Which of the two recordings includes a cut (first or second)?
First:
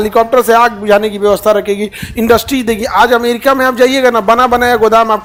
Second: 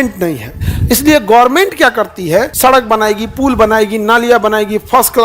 second